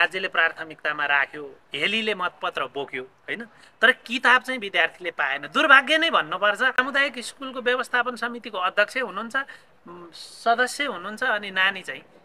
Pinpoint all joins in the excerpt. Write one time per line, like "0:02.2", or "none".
0:06.8

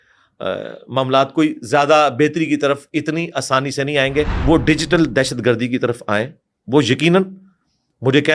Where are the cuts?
0:04.4

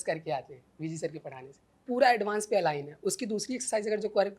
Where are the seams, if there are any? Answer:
0:01.7

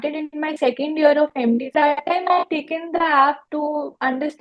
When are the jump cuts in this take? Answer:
0:01.7
0:03.4

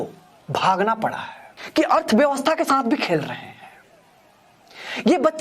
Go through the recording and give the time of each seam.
0:01.6

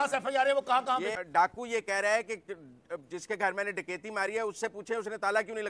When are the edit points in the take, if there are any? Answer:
0:01.1

